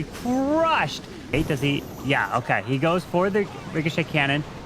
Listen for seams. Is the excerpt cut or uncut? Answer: cut